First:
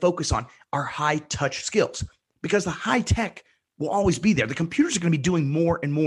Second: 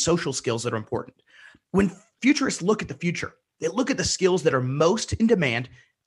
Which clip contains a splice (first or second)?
second